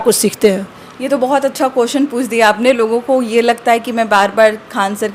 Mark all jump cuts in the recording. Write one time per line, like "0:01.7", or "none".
none